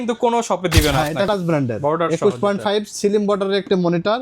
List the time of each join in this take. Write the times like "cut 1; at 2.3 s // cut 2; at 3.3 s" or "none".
cut 1; at 1.3 s